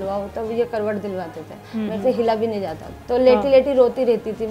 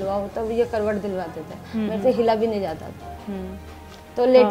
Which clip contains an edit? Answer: first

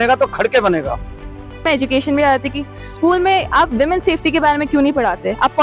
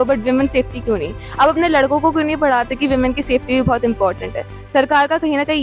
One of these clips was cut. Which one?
first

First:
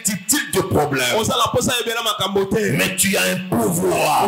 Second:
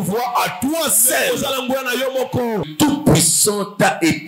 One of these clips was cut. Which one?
second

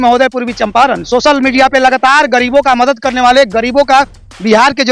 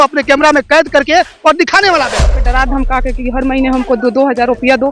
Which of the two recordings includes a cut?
second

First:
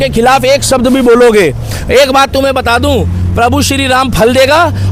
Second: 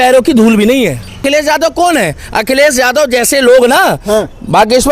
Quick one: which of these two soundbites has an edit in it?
second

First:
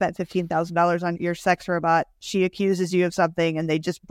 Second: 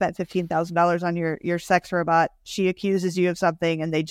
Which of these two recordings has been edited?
first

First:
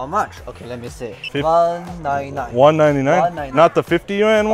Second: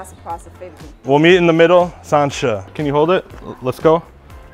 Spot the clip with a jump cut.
second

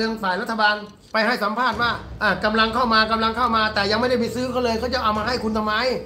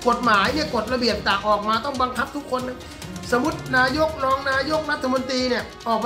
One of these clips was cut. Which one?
first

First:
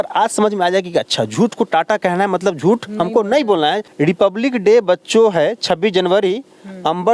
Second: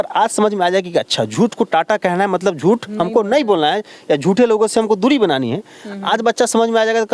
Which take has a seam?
first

